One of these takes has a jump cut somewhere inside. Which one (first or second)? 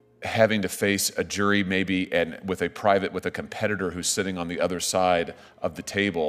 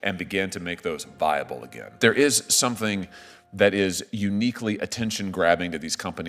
second